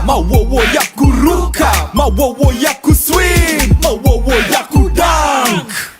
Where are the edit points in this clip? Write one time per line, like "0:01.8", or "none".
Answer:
0:03.5
0:05.1